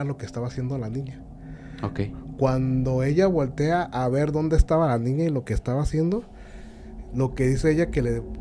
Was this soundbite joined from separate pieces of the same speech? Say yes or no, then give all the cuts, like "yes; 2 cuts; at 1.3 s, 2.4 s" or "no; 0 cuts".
no; 0 cuts